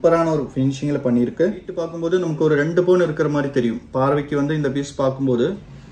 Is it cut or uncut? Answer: cut